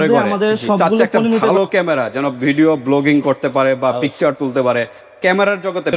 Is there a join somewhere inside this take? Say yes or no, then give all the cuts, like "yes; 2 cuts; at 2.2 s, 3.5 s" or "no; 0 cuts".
yes; 1 cut; at 1.5 s